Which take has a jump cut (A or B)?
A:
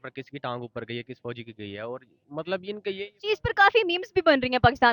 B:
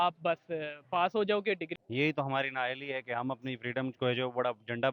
B